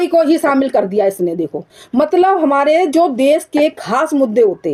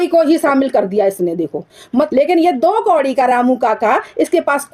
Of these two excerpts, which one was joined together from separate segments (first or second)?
second